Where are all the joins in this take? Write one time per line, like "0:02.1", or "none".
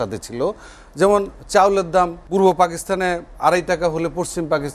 0:02.2
0:03.3